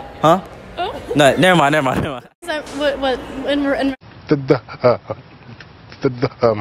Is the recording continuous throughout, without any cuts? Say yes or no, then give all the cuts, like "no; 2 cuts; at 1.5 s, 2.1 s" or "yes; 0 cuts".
no; 1 cut; at 2.6 s